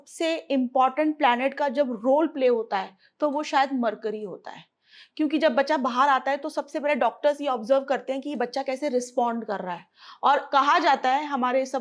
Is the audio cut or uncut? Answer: uncut